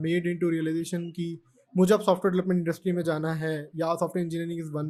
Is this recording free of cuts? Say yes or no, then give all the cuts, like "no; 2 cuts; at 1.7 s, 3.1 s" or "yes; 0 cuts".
yes; 0 cuts